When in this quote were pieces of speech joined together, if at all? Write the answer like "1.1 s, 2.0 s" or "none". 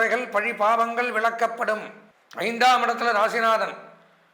2.0 s